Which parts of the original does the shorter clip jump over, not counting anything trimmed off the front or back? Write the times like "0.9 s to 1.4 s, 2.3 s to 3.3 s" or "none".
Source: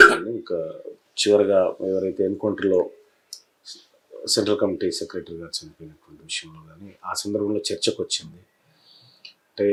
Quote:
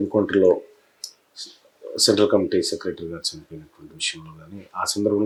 none